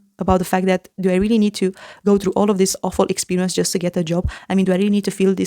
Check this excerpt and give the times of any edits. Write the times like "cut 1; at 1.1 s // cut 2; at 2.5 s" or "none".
none